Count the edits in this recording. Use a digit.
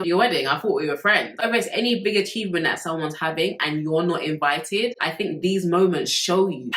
1